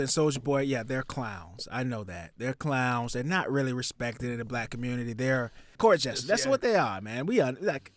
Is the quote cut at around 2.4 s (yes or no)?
no